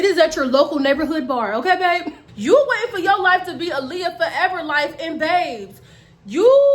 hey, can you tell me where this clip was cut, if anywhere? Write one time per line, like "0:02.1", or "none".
0:02.2